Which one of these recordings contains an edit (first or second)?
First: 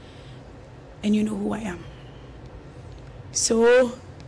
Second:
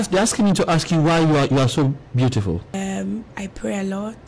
second